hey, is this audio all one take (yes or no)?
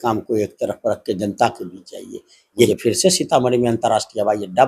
no